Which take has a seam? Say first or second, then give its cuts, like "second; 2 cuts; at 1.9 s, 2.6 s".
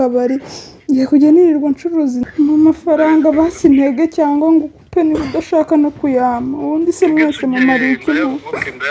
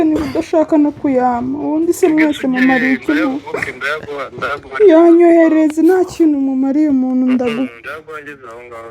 first; 1 cut; at 2.2 s